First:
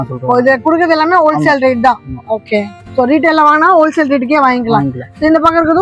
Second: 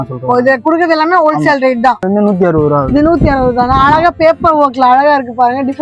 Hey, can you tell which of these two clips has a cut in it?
second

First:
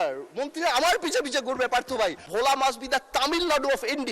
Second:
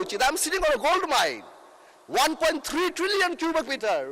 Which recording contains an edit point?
first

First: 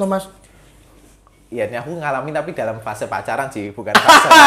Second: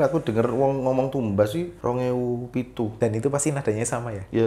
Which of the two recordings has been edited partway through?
second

